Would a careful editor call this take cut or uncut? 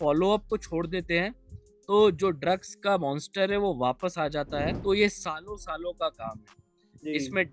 cut